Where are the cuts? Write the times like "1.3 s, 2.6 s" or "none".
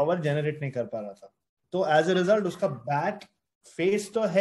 none

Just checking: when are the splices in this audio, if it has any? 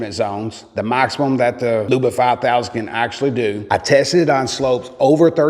3.6 s

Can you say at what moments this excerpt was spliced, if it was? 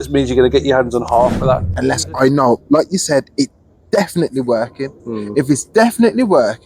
1.7 s

